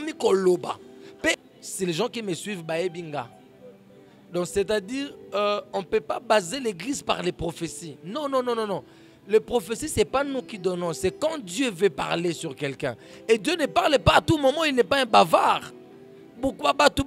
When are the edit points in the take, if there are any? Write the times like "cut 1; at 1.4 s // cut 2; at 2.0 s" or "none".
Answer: cut 1; at 1.4 s